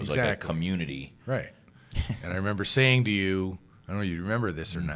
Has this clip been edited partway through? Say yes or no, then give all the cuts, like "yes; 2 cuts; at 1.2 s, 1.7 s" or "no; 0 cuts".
yes; 1 cut; at 1.6 s